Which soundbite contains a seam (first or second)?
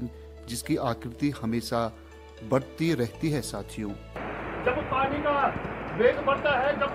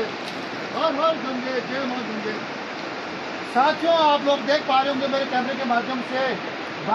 first